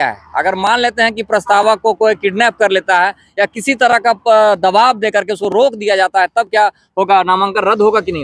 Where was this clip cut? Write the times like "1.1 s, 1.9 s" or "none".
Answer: none